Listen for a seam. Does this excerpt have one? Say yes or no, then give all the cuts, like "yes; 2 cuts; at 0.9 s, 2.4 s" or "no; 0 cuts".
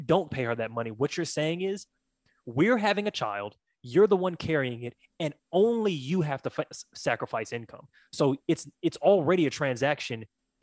no; 0 cuts